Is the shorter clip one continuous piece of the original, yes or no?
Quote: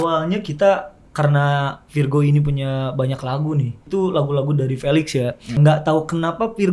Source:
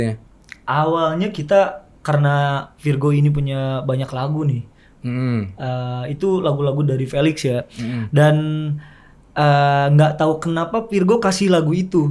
no